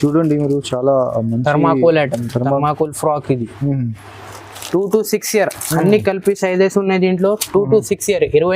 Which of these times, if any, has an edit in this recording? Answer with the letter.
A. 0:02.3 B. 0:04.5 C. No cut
B